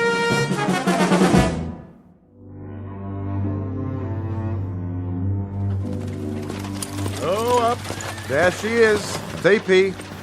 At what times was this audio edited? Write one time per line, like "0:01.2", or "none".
0:01.3